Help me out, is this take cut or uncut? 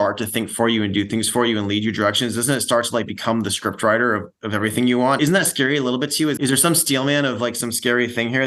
cut